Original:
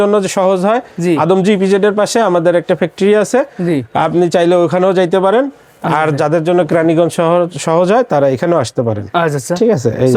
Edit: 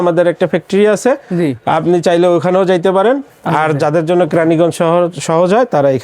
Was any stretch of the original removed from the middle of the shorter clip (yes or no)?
yes